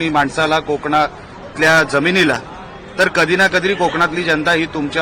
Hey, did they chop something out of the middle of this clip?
no; 0 cuts

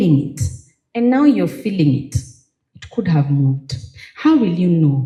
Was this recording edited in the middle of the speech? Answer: no; 0 cuts

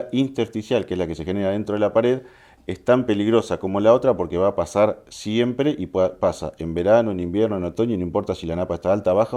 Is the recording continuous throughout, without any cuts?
yes; 0 cuts

